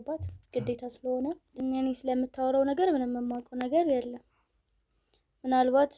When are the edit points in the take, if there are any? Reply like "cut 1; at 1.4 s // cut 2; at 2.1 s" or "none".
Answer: cut 1; at 1.6 s